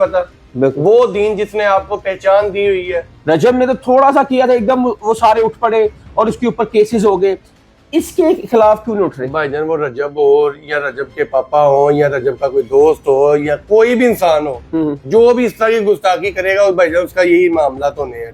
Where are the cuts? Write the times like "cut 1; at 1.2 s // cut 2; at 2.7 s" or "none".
cut 1; at 3.1 s